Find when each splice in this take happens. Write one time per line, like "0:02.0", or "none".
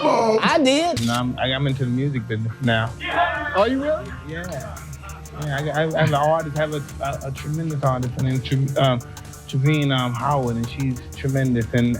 0:01.0